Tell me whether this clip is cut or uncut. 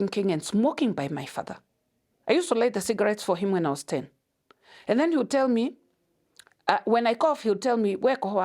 uncut